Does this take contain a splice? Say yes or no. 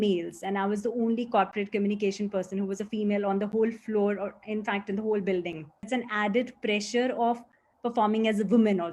yes